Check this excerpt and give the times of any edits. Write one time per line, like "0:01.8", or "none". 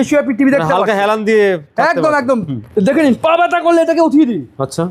none